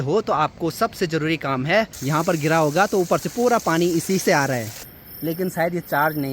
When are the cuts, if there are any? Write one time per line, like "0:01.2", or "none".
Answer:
0:02.0
0:04.8